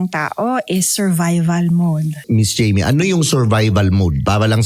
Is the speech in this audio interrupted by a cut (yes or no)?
yes